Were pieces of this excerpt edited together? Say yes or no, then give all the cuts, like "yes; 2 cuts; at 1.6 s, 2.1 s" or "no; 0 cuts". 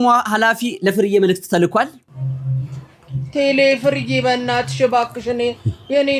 no; 0 cuts